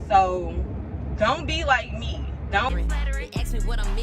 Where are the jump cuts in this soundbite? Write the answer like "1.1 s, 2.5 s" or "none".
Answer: 2.7 s

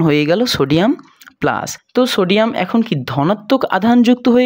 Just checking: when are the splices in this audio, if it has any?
1.8 s

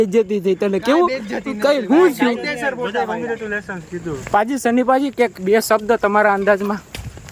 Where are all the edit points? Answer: 4.2 s

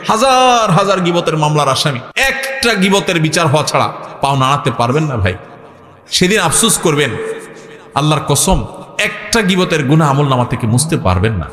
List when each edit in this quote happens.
2.1 s

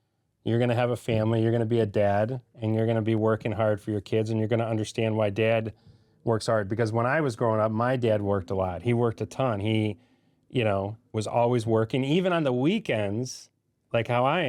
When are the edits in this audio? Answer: none

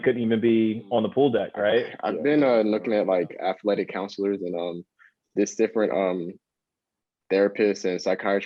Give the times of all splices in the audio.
2.0 s

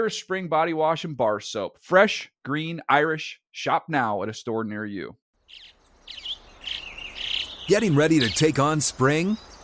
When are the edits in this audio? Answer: 5.2 s

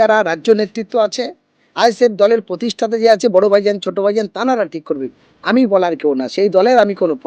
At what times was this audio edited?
none

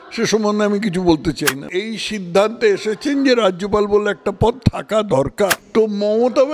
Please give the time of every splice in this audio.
1.7 s, 5.6 s

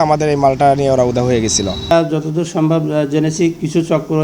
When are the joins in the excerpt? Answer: 1.8 s

